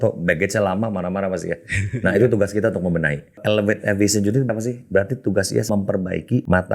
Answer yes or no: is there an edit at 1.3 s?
no